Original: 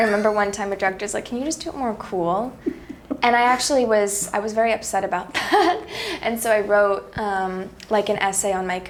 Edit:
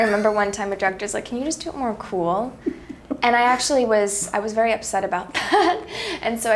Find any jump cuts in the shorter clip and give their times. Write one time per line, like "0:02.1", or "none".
none